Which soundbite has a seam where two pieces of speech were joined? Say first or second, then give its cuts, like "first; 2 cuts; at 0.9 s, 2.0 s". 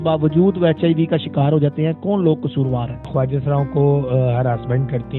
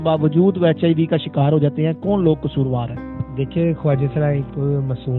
first; 1 cut; at 3.1 s